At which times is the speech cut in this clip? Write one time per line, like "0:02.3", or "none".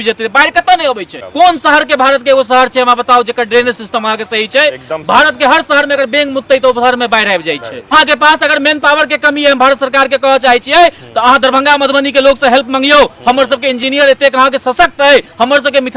0:01.1
0:07.9